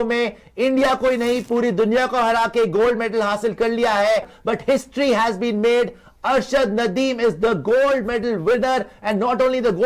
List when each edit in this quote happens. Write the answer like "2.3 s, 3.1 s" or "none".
4.3 s